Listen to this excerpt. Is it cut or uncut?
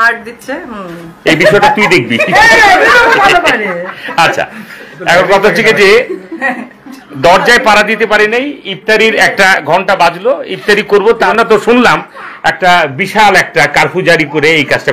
uncut